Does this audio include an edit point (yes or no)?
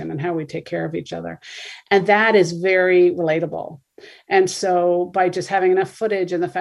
no